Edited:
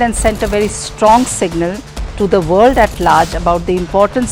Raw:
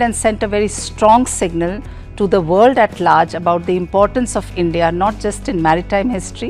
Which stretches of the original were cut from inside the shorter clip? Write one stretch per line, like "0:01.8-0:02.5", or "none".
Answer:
none